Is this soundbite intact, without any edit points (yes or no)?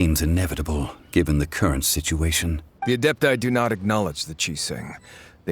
no